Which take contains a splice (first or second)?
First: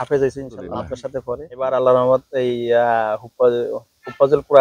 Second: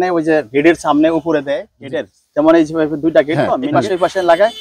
second